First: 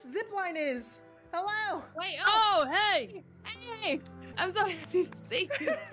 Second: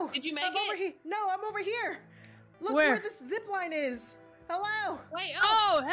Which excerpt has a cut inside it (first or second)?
first